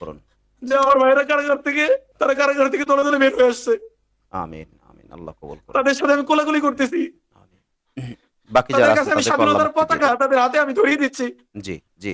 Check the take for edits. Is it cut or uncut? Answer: uncut